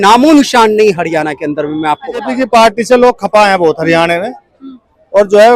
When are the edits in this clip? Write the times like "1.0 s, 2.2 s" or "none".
2.3 s